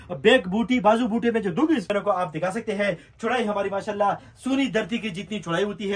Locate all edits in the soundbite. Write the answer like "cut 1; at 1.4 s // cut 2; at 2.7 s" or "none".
cut 1; at 1.9 s